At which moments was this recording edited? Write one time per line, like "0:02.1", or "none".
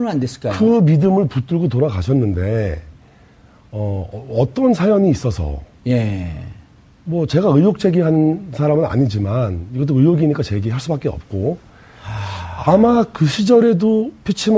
0:04.5